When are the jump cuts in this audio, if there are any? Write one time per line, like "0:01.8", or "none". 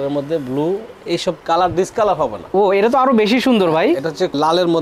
0:02.5